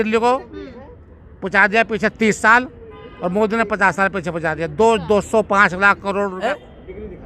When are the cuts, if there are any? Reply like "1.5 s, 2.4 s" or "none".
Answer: 6.4 s